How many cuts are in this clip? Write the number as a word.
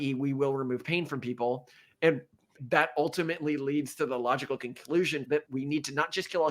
two